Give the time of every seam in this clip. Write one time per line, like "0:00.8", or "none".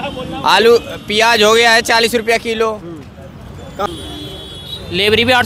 0:03.9